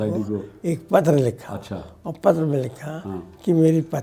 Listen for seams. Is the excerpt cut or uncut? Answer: uncut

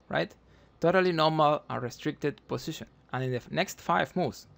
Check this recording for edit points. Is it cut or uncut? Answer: cut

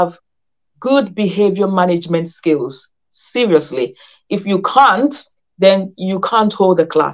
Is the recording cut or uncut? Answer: uncut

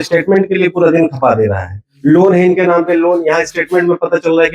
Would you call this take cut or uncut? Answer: uncut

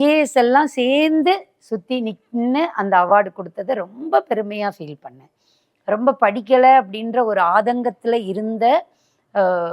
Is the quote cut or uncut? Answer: cut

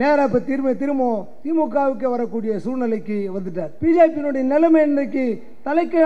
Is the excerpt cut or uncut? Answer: cut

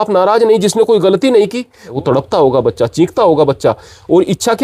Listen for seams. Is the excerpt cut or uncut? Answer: cut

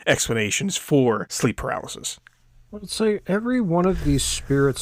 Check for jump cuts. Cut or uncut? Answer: cut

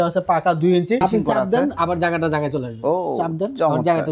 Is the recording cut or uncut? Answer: cut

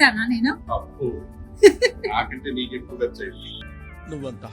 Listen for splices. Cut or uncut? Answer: uncut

